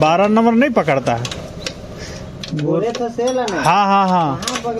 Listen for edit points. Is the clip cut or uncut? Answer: uncut